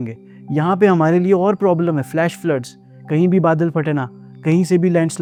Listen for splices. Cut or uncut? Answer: uncut